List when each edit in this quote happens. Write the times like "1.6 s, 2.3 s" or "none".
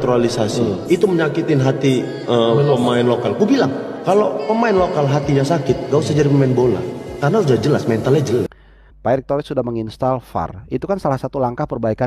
8.6 s